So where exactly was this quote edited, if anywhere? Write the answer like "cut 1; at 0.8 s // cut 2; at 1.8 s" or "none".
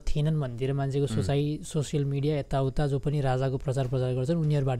none